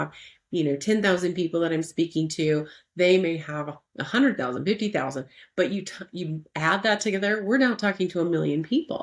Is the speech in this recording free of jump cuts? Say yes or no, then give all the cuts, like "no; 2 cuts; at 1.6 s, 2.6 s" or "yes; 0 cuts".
yes; 0 cuts